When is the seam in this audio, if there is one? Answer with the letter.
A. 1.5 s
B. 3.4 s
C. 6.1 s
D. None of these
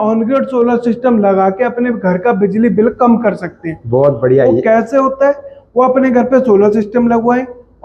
D